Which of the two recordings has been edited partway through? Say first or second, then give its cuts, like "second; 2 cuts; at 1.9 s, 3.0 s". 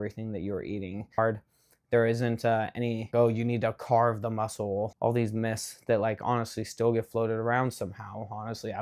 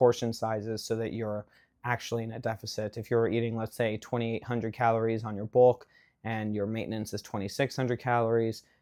first; 3 cuts; at 1.2 s, 3.1 s, 4.9 s